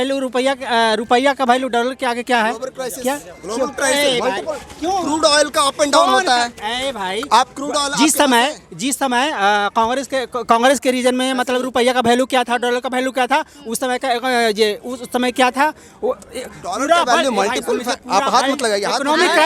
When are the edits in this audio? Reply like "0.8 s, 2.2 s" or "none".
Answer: none